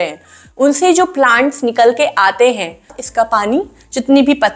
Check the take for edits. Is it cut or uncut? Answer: cut